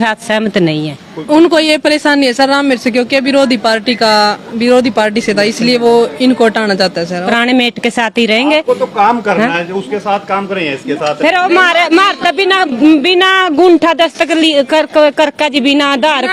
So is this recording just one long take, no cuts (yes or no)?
no